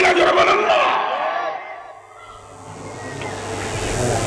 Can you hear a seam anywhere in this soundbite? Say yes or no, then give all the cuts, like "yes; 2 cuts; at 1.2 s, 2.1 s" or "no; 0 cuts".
no; 0 cuts